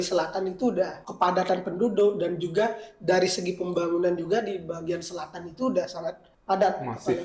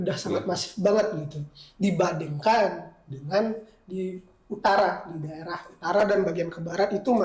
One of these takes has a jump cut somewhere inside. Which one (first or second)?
first